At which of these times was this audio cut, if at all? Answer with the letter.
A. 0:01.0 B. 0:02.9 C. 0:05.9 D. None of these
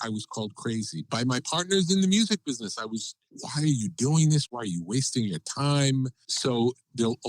A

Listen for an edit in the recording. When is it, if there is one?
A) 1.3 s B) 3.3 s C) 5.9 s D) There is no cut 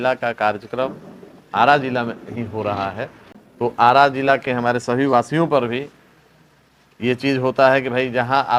D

